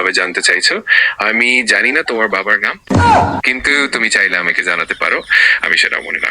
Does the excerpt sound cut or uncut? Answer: uncut